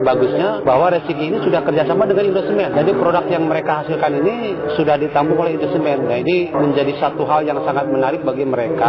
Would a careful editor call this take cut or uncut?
uncut